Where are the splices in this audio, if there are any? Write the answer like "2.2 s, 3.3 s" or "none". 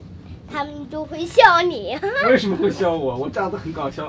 none